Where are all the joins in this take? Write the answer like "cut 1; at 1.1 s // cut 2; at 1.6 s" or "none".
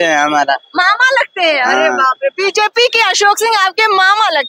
none